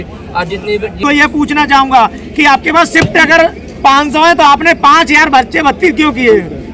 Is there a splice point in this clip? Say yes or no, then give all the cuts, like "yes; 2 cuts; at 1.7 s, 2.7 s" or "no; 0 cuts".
yes; 1 cut; at 1.0 s